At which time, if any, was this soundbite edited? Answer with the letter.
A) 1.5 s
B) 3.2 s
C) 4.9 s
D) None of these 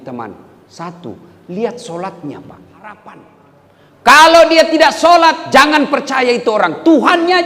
B